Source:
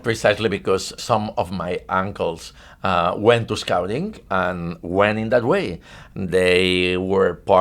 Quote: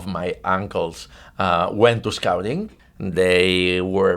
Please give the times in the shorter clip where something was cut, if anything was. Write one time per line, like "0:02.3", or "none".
0:02.7

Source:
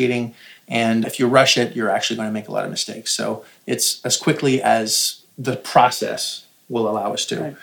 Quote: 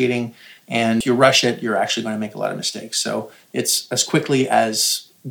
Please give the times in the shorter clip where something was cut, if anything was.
0:01.0

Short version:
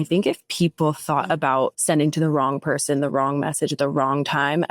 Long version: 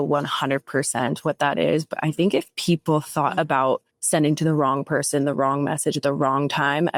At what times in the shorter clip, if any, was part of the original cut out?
0:01.8

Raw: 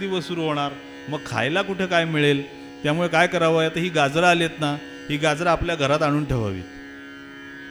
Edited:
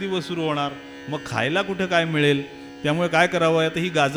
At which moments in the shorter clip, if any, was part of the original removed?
none

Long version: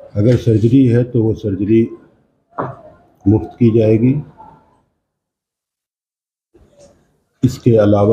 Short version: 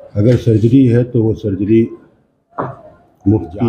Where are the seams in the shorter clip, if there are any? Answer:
none

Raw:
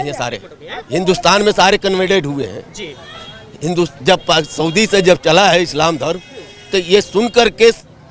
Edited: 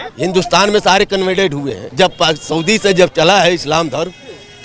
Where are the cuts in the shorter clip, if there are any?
0:01.9

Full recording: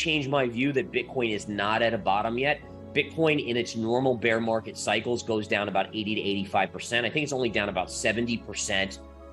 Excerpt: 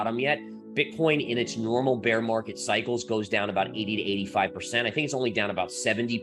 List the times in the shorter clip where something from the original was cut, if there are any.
none

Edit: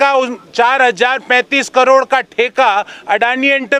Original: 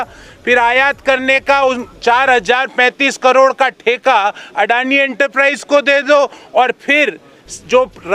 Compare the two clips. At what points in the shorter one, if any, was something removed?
none

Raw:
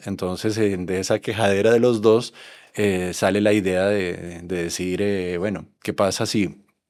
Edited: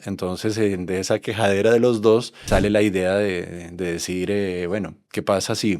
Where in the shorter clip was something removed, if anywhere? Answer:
0:02.4

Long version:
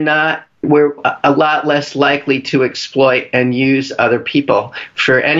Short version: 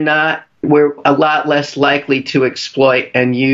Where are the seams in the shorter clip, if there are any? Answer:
0:01.0

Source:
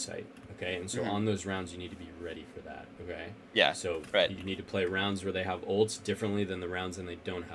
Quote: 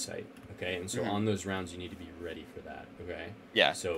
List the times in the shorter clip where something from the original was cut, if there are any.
none

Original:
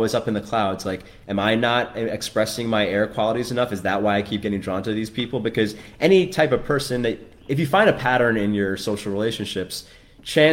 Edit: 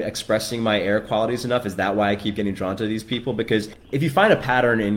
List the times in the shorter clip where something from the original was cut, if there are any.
0:03.8

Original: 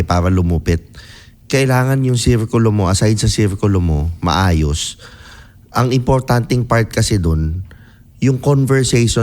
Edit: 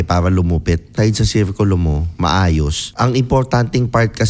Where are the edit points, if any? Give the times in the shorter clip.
0:00.9
0:02.8

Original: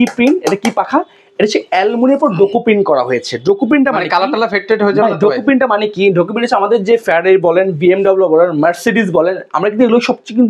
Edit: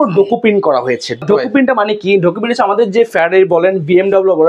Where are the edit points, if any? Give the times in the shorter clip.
0:01.2

